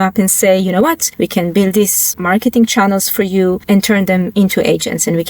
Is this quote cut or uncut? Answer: cut